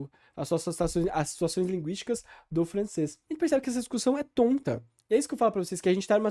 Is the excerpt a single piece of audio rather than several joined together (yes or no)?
no